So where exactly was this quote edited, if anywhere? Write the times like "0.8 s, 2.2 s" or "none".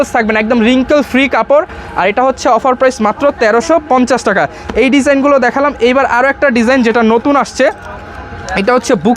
none